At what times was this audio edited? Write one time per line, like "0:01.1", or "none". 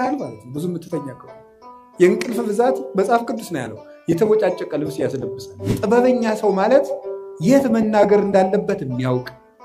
0:05.6